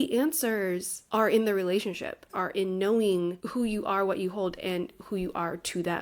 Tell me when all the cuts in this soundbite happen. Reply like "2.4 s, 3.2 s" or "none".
0.9 s, 2.4 s, 3.4 s